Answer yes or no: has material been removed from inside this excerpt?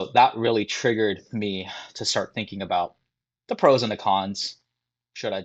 no